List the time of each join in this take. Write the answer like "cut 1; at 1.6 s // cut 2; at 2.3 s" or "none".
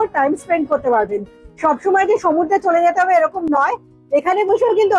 none

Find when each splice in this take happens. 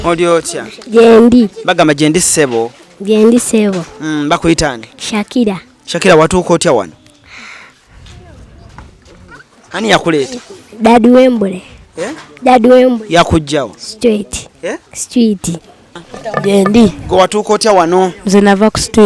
cut 1; at 15.9 s

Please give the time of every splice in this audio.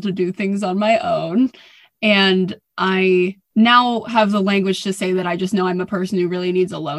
cut 1; at 3.4 s

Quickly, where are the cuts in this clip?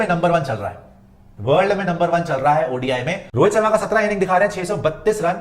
cut 1; at 3.2 s

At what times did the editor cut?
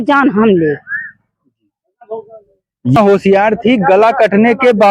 cut 1; at 3.0 s

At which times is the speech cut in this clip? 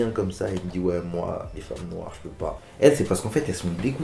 cut 1; at 2.6 s

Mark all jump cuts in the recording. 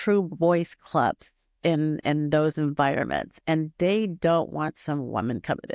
none

